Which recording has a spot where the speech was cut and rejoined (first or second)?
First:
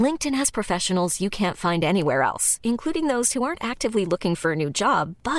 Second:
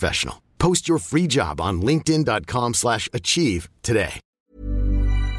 second